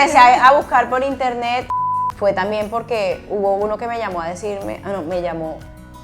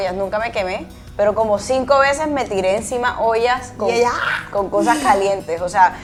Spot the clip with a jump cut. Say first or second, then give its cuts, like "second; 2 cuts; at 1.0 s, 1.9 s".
first; 1 cut; at 1.7 s